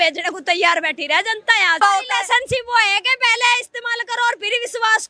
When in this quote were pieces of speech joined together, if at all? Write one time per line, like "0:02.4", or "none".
0:01.8